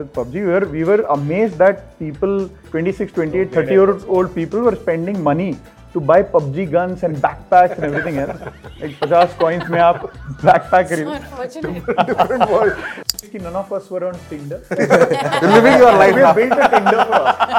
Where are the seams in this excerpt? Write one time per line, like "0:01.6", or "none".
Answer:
0:13.2